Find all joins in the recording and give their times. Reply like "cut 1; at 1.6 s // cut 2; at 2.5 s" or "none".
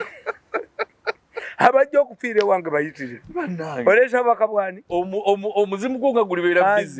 none